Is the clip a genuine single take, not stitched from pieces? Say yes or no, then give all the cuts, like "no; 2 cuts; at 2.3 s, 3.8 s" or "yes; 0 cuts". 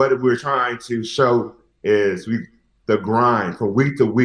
yes; 0 cuts